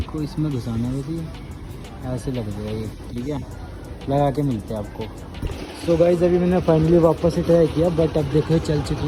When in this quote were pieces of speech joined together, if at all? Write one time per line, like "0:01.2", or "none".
none